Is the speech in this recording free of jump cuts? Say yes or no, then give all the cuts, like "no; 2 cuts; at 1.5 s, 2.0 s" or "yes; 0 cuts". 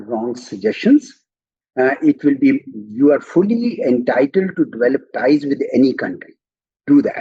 yes; 0 cuts